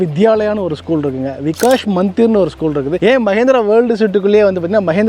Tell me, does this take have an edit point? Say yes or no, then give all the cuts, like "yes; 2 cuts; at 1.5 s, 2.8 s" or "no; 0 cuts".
no; 0 cuts